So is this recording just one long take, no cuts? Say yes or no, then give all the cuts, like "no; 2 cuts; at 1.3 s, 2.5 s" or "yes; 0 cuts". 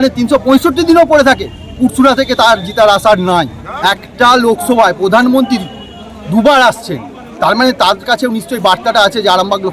no; 1 cut; at 3.6 s